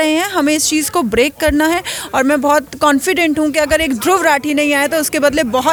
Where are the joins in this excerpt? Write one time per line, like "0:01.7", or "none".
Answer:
none